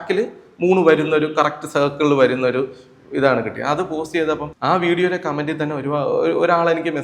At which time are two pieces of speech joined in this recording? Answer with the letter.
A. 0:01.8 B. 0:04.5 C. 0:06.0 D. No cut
B